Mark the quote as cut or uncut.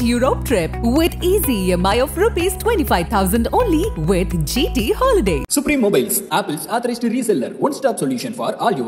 uncut